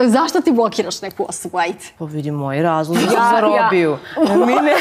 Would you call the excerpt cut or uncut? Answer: cut